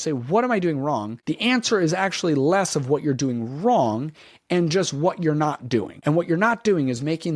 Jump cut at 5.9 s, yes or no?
yes